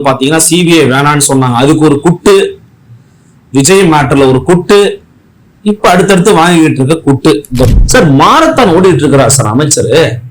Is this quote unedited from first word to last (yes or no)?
no